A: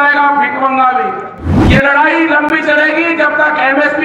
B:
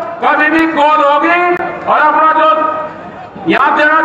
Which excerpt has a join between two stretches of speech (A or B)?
A